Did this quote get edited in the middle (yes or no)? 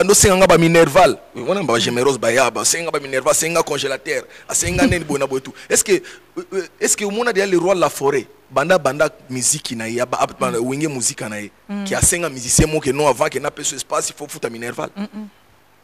no